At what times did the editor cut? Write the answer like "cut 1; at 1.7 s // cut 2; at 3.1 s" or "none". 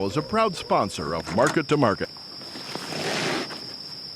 cut 1; at 2.1 s

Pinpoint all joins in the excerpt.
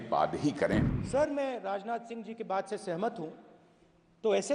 cut 1; at 1.0 s

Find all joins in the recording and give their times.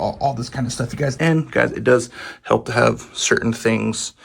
cut 1; at 1.2 s

